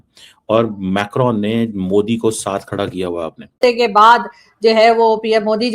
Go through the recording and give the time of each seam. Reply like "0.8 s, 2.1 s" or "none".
3.6 s